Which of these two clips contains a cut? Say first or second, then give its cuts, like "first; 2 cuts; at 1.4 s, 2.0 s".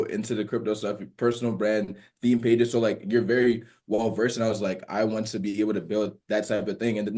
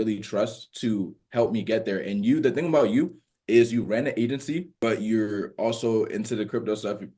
second; 1 cut; at 4.7 s